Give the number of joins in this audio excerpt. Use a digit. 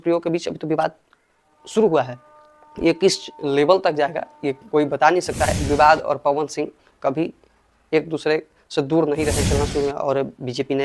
2